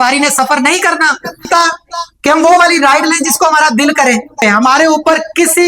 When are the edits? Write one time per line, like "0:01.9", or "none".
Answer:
0:01.5
0:04.4

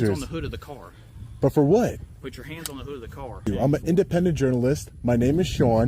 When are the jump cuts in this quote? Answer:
0:03.5

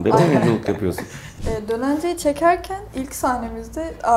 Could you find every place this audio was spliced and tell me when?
0:01.3

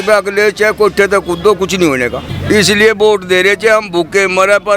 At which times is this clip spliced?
0:02.3

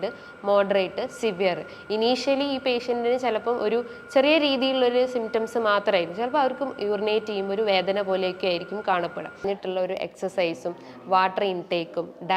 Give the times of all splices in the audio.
0:09.4

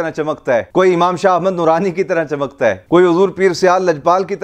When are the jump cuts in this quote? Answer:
none

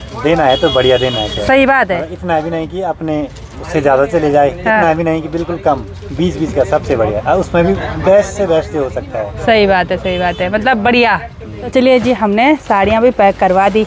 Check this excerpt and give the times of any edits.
none

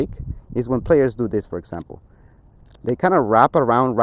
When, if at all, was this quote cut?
none

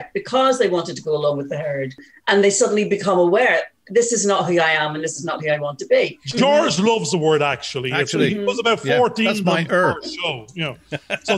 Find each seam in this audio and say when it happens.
0:02.1
0:06.2

